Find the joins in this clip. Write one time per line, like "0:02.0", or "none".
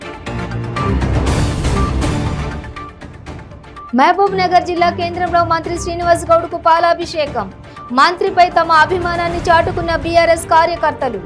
none

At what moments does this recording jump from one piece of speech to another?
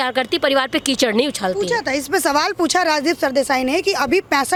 none

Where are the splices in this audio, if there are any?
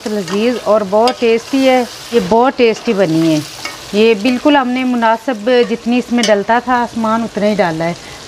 0:02.0

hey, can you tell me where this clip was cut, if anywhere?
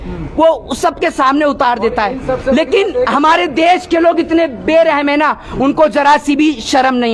none

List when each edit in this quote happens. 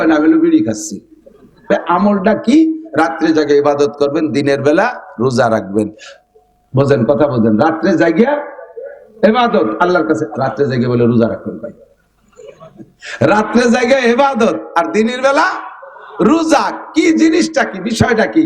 0:01.7

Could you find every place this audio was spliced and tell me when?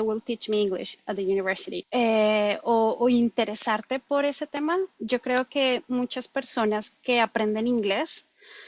0:01.7

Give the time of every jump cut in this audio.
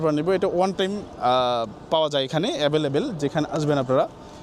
none

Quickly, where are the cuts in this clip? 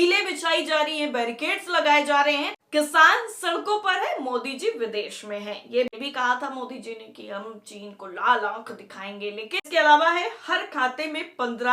0:02.6
0:05.9
0:09.6

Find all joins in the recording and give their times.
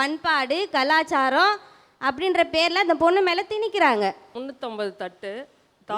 0:04.3

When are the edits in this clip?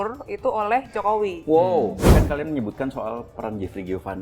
0:02.0

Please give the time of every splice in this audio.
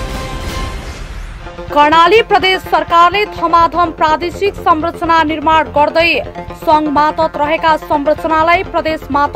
0:01.3

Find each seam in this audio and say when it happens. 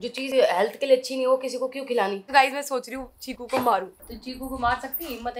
0:02.2
0:04.0

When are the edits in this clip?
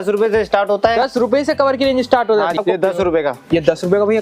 0:02.6

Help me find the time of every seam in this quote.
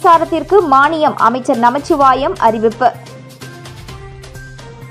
none

